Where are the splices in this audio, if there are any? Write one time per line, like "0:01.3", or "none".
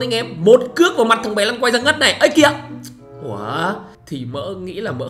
0:03.9